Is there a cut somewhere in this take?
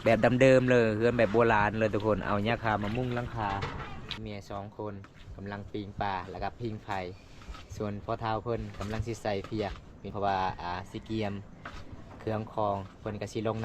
yes; 2 cuts; at 4.2 s, 10.1 s

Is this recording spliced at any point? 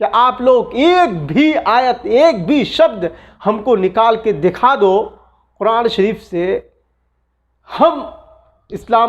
no; 0 cuts

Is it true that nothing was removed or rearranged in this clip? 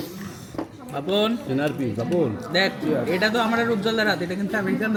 yes; 0 cuts

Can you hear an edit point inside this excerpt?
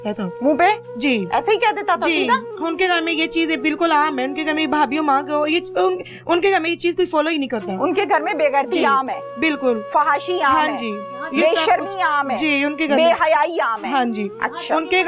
no; 0 cuts

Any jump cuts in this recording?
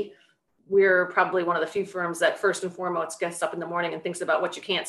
no; 0 cuts

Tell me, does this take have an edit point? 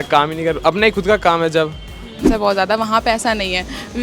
yes; 1 cut; at 2.2 s

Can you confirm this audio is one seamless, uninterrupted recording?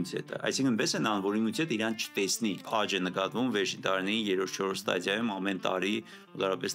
no; 1 cut; at 2.7 s

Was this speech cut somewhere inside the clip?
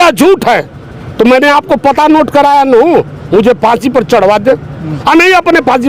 no; 0 cuts

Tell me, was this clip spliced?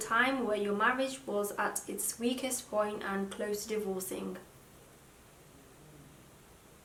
no; 0 cuts

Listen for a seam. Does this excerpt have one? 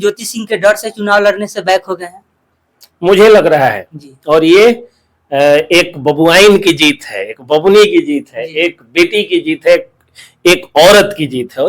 no; 0 cuts

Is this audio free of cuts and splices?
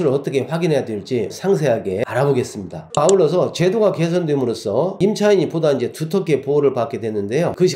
yes; 0 cuts

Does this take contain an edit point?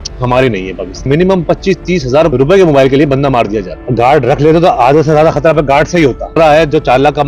yes; 4 cuts; at 0.9 s, 2.3 s, 3.8 s, 6.3 s

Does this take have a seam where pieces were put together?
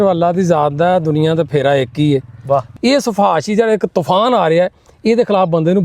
yes; 1 cut; at 2.7 s

